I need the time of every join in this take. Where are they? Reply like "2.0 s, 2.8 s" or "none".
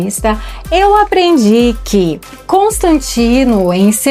2.4 s